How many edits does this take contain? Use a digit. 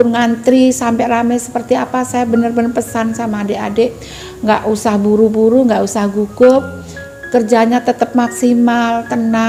0